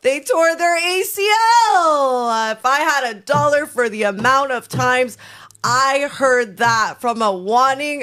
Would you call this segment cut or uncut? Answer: cut